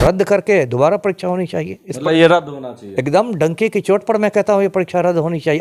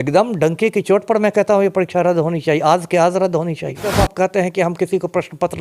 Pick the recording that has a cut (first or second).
second